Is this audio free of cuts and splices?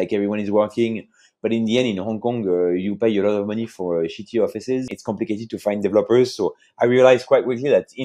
no; 1 cut; at 4.9 s

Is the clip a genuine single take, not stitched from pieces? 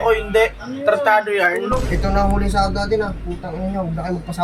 no; 1 cut; at 1.8 s

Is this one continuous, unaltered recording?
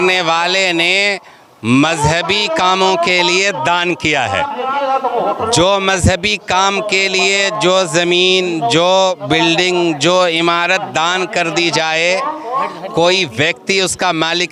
yes; 0 cuts

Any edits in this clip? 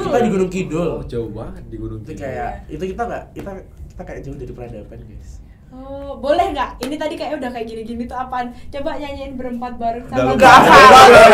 no; 0 cuts

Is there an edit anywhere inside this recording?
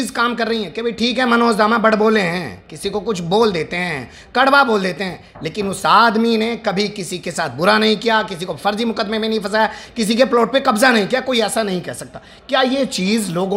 no; 0 cuts

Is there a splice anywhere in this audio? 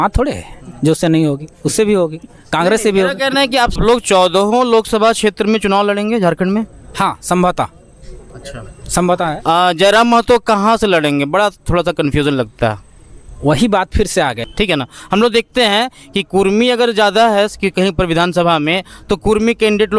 yes; 2 cuts; at 3.8 s, 14.4 s

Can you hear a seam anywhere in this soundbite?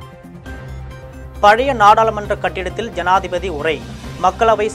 no; 0 cuts

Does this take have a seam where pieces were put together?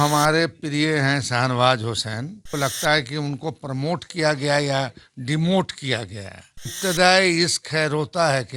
yes; 2 cuts; at 2.5 s, 6.8 s

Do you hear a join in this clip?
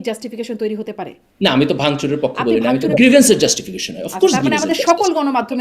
yes; 2 cuts; at 1.2 s, 3.0 s

